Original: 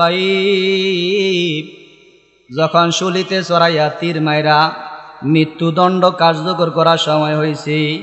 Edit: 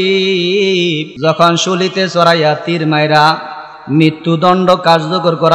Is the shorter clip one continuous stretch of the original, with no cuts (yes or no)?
no